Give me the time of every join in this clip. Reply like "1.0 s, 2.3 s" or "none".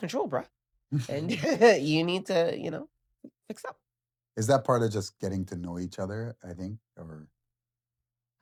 none